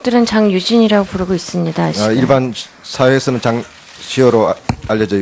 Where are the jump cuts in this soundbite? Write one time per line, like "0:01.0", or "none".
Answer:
none